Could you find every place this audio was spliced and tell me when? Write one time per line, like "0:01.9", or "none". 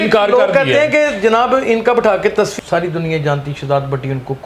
0:02.5